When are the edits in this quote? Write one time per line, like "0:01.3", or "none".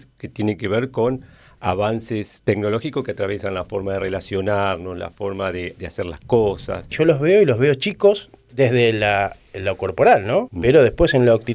0:06.9
0:10.5